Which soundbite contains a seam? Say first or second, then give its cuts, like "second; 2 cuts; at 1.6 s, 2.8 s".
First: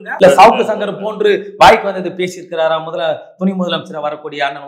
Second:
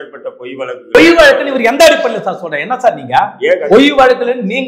second; 1 cut; at 0.9 s